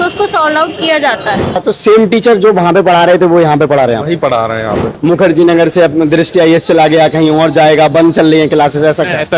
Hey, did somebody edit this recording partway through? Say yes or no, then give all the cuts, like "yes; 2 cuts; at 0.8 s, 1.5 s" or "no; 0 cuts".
yes; 2 cuts; at 1.6 s, 5.0 s